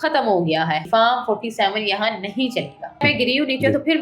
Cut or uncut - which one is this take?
cut